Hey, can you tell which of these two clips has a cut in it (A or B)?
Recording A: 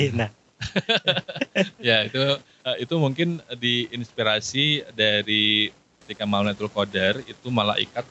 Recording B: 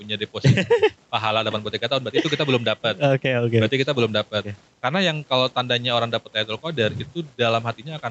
A